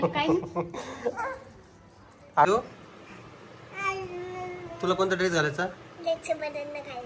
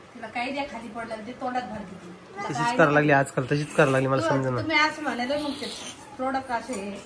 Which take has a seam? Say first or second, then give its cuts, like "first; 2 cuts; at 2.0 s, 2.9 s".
first; 1 cut; at 2.5 s